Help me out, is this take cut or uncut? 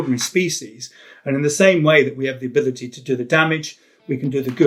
uncut